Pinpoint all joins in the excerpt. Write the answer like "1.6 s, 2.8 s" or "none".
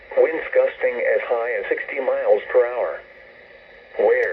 2.0 s